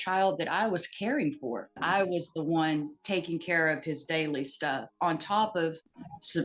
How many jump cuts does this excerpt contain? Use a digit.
1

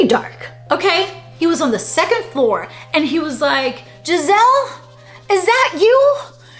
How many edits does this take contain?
1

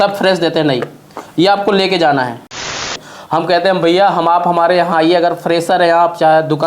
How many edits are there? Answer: 1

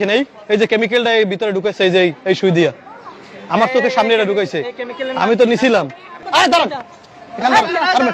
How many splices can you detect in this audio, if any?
1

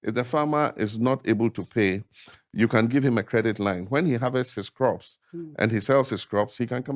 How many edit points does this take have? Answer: 0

